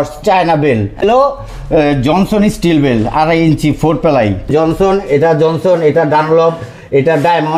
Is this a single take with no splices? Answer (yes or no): no